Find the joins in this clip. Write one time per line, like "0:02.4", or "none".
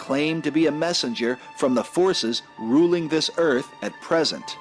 0:02.2